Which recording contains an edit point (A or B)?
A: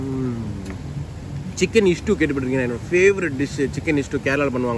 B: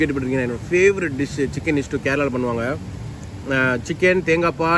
A